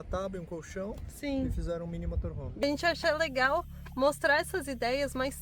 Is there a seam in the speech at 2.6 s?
yes; 1 cut; at 2.6 s

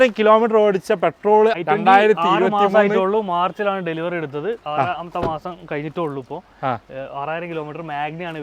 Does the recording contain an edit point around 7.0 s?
no; 1 cut; at 1.6 s

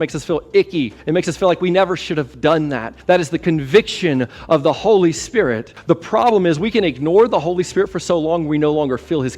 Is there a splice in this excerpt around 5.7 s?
yes; 3 cuts; at 1.0 s, 2.9 s, 5.7 s

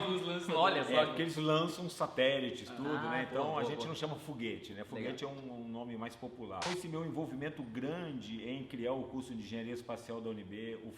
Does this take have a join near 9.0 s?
no; 1 cut; at 6.6 s

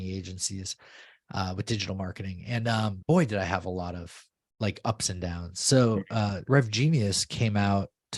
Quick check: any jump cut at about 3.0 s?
yes; 2 cuts; at 3.0 s, 6.4 s

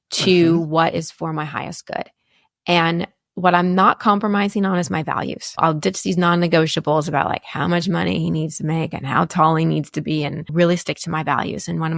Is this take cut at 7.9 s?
no; 2 cuts; at 5.6 s, 10.5 s

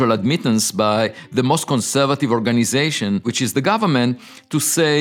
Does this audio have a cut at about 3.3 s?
yes; 1 cut; at 3.3 s

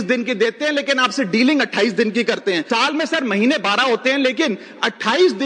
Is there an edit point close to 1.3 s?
no; 1 cut; at 2.6 s

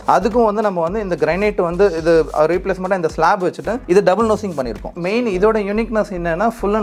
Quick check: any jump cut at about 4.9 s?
yes; 1 cut; at 4.9 s

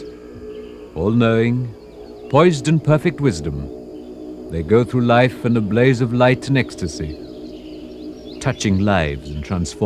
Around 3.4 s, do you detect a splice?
yes; 1 cut; at 3.4 s

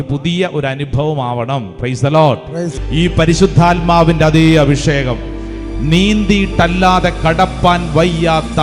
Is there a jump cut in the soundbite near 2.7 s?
yes; 1 cut; at 2.7 s

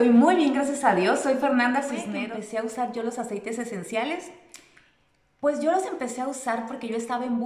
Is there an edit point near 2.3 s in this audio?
yes; 1 cut; at 2.3 s

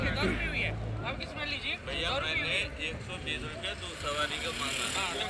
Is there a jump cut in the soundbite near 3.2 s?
no; 0 cuts

